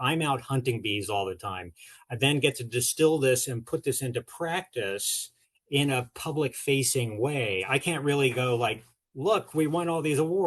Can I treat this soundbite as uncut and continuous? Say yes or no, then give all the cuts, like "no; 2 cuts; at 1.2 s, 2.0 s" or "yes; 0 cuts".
no; 1 cut; at 7.6 s